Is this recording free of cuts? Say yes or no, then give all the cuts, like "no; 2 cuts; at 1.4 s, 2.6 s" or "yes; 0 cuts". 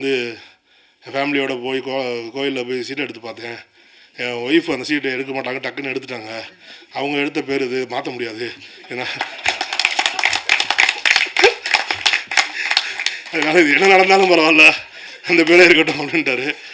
yes; 0 cuts